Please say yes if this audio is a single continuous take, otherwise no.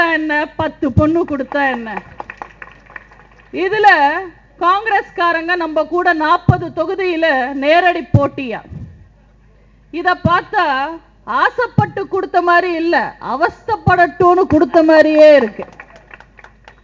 yes